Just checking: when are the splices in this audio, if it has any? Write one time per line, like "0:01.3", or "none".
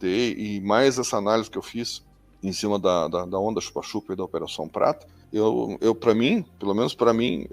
none